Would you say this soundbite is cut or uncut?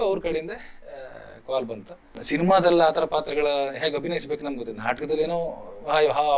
cut